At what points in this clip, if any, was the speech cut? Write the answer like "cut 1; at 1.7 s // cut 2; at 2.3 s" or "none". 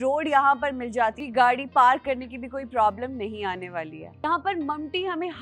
cut 1; at 1.2 s // cut 2; at 4.2 s